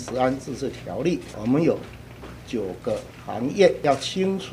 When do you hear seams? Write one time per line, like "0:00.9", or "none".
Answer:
0:01.3
0:03.8